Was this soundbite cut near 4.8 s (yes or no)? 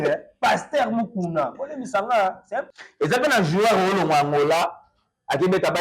no